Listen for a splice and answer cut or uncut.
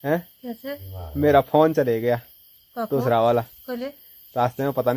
uncut